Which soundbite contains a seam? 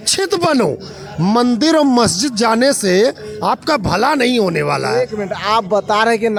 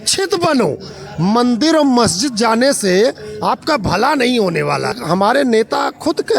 second; 1 cut; at 4.9 s

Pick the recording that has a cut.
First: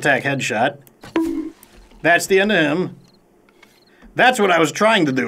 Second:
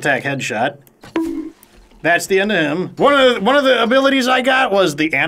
second; 1 cut; at 2.9 s

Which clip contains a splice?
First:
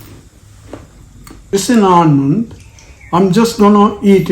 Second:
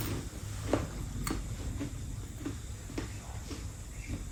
first; 1 cut; at 1.5 s

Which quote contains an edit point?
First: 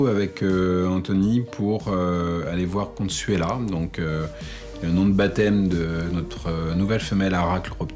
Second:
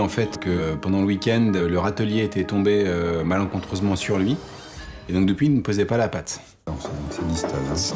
first; 1 cut; at 6.6 s

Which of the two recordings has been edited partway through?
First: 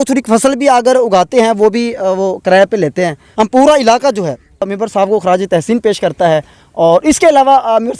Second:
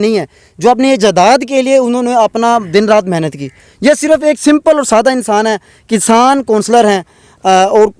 first; 2 cuts; at 3.2 s, 4.7 s

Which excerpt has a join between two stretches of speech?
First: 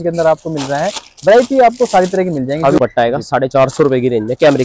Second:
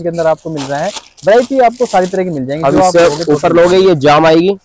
first; 1 cut; at 2.8 s

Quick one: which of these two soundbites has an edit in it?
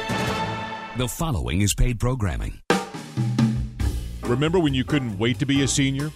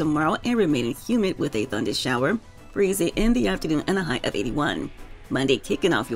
first; 2 cuts; at 0.9 s, 2.5 s

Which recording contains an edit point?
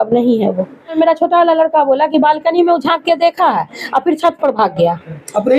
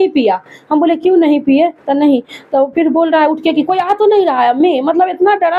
first; 1 cut; at 0.9 s

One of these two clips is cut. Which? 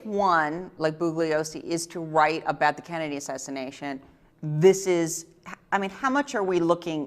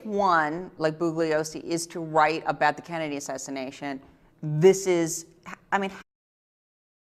first; 1 cut; at 6.0 s

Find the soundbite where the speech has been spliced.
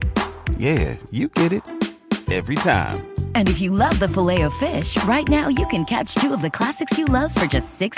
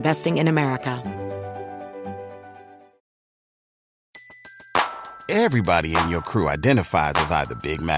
second; 1 cut; at 1.0 s

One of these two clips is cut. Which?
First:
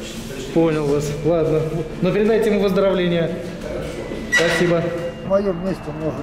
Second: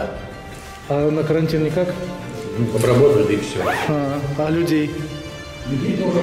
first; 1 cut; at 5.2 s

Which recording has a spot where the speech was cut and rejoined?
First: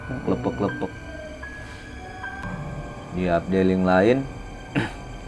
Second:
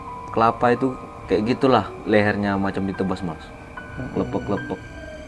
first; 1 cut; at 2.4 s

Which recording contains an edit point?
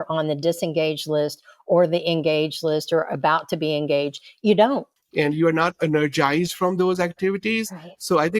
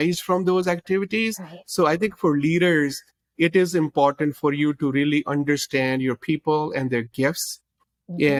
first; 1 cut; at 4.9 s

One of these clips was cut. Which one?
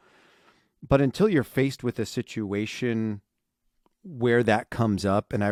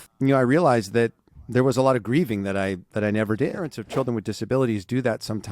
second; 1 cut; at 3.7 s

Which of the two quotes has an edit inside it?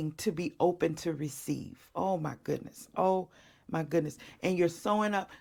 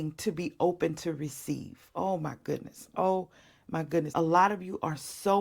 second; 1 cut; at 4.1 s

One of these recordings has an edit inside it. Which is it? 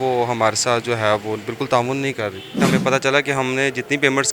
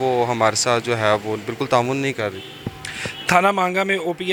first; 1 cut; at 2.7 s

